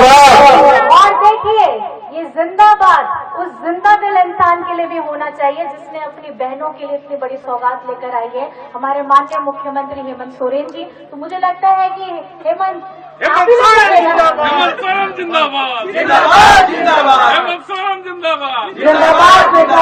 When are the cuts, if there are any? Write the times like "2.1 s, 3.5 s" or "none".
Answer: none